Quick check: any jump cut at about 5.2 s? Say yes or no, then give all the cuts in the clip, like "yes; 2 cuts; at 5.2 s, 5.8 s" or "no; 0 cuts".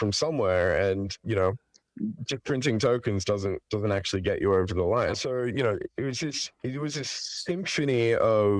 yes; 1 cut; at 5.2 s